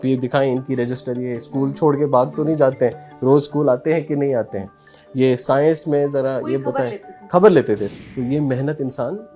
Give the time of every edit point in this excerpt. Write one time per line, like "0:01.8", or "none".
0:07.9

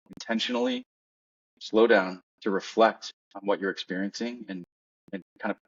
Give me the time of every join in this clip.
none

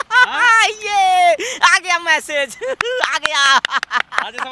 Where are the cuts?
none

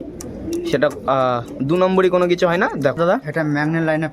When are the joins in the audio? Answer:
0:03.0

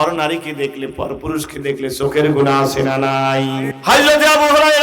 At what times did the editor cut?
0:03.7

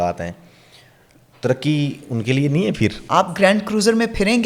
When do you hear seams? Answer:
0:03.0

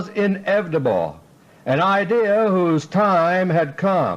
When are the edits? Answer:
0:01.8

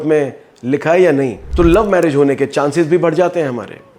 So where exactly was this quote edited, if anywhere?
0:01.4

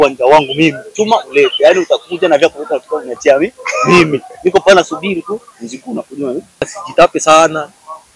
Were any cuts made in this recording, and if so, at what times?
0:06.8

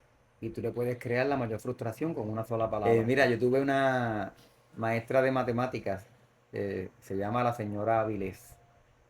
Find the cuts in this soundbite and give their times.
0:02.8

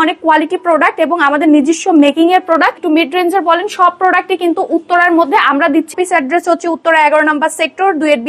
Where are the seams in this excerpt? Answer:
0:02.8
0:05.9

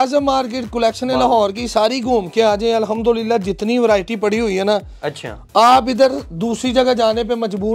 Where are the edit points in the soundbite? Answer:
none

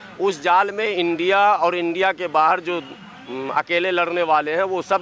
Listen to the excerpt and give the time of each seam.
none

